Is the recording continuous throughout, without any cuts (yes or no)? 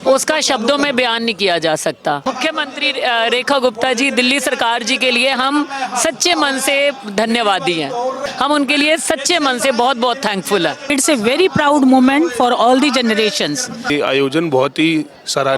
no